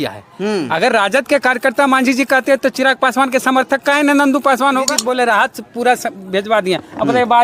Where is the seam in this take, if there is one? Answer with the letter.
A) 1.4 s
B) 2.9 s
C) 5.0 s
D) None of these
C